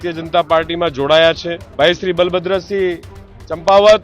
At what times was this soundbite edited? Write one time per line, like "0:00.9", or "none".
0:01.6